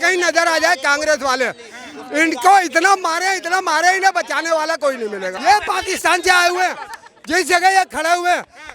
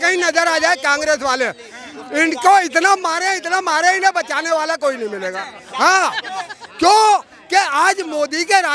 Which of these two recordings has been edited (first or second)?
first